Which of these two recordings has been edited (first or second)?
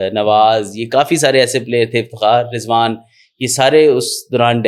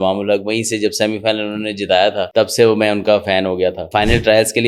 second